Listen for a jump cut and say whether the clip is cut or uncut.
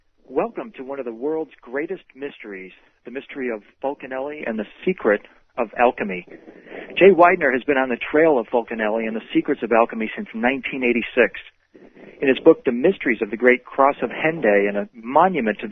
uncut